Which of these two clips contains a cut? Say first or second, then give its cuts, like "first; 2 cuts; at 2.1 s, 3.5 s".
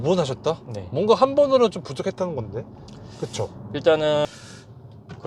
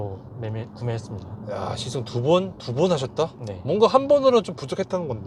first; 1 cut; at 4.3 s